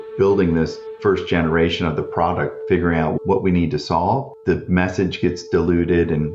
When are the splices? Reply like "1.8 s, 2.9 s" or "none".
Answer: none